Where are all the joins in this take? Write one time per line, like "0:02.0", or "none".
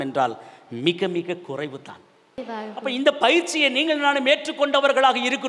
0:02.4

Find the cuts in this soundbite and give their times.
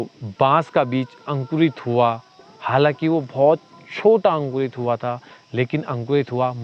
none

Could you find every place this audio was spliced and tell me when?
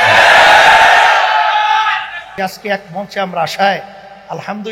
0:02.2

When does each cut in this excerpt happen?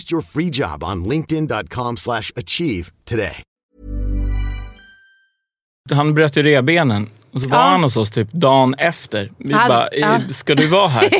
0:05.8

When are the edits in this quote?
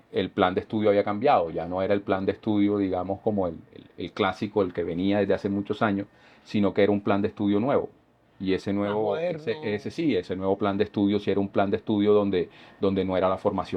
none

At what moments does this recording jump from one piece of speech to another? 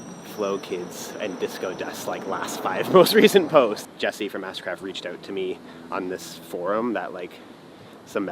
0:03.9

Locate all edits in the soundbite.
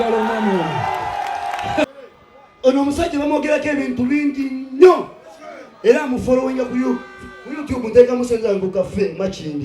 0:01.8

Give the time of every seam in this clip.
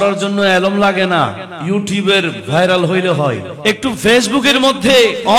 0:01.5
0:03.5

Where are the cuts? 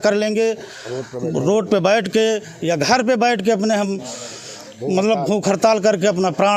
none

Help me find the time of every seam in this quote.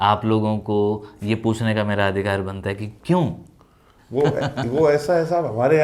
none

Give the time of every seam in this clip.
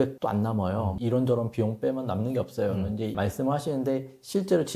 0:03.1

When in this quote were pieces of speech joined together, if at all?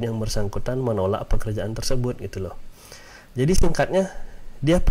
none

